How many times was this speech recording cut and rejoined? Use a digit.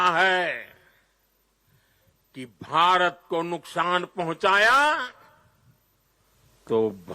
1